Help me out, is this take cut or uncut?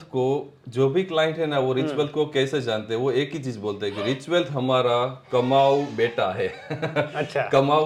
uncut